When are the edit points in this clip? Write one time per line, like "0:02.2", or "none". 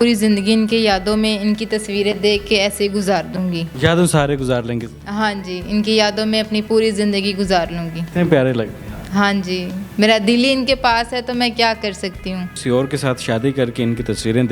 none